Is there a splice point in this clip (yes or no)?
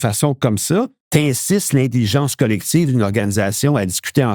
yes